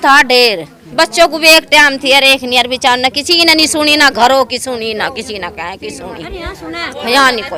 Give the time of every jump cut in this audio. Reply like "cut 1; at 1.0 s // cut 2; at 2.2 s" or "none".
none